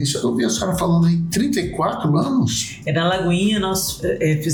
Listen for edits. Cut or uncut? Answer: uncut